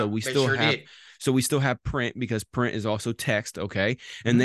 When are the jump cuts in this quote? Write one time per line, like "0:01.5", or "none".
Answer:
none